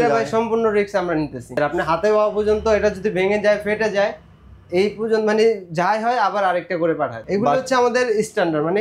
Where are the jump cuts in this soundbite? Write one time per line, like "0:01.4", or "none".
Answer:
0:01.6
0:07.2